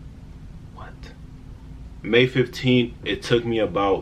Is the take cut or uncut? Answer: cut